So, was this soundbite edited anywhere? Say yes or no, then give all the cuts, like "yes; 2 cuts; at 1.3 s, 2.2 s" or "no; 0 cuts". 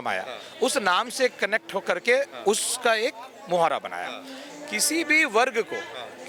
no; 0 cuts